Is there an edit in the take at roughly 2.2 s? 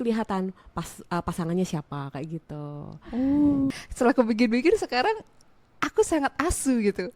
no; 1 cut; at 3.7 s

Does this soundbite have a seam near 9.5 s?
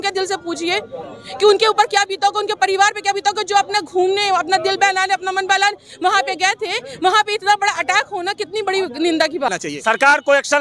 yes; 1 cut; at 9.5 s

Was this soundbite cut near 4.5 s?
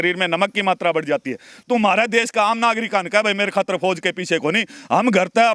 no; 1 cut; at 1.5 s

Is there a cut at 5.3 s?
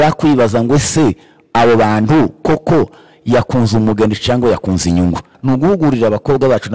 yes; 1 cut; at 5.3 s

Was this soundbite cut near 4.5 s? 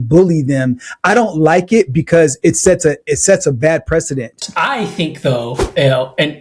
yes; 1 cut; at 4.5 s

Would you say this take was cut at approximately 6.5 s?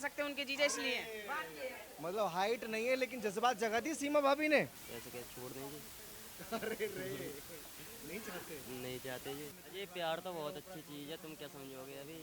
no; 3 cuts; at 1.9 s, 4.8 s, 9.6 s

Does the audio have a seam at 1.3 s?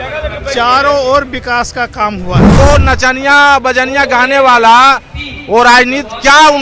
no; 1 cut; at 2.6 s

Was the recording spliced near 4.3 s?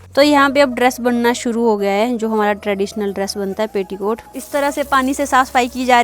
yes; 1 cut; at 4.3 s

